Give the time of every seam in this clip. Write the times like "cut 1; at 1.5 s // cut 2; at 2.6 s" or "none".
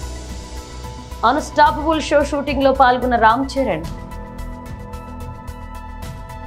none